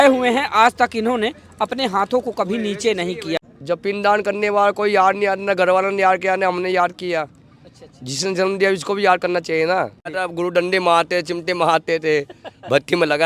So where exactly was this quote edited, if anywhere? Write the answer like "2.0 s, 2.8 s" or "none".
3.4 s, 10.0 s